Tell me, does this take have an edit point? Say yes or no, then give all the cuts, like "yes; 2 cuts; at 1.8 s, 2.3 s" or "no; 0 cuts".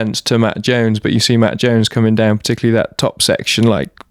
no; 0 cuts